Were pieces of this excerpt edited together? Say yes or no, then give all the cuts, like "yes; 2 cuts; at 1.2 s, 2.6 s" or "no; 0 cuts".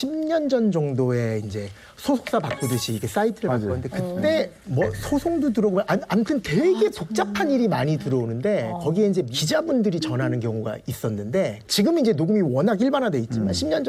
no; 0 cuts